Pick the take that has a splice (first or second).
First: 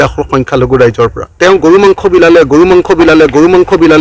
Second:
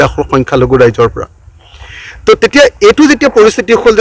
first